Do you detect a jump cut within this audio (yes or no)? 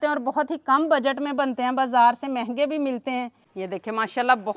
yes